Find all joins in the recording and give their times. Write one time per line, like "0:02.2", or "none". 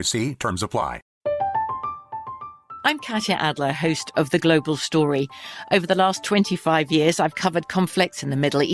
0:01.1